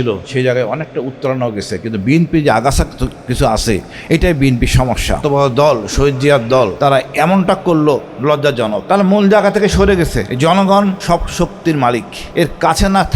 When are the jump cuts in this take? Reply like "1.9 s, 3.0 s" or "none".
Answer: 5.2 s, 6.7 s, 8.8 s, 10.3 s, 11.0 s, 12.2 s